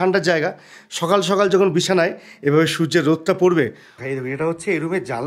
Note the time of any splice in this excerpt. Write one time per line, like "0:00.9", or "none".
0:04.0

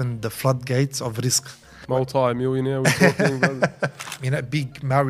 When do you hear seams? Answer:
0:01.7
0:04.1

